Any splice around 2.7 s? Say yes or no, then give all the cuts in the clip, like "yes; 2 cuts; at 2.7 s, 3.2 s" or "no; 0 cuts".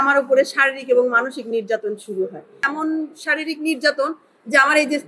yes; 1 cut; at 2.7 s